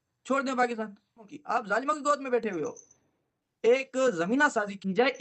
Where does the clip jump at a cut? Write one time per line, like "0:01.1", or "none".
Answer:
0:01.3
0:03.4